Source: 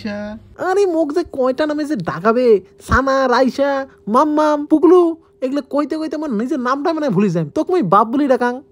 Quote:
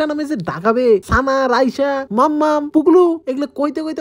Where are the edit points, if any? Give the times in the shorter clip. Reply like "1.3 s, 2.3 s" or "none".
1.1 s, 2.0 s, 3.2 s